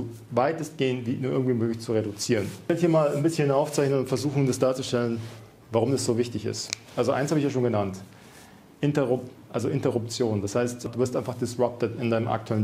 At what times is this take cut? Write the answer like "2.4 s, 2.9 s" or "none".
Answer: 2.7 s, 10.9 s